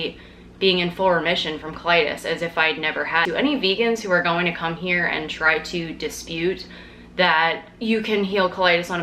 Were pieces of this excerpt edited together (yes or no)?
yes